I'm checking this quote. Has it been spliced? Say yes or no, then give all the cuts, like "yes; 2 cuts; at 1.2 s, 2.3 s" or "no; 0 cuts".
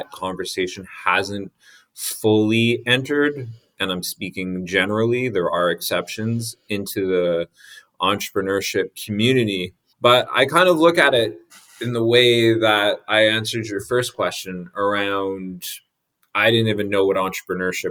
no; 0 cuts